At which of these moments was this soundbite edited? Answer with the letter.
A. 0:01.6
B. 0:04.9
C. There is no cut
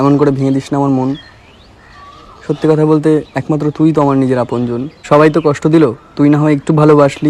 C